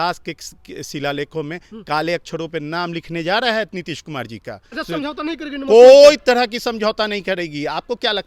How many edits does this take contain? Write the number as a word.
one